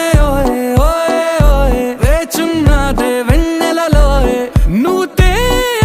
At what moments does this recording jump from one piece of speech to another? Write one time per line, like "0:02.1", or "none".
none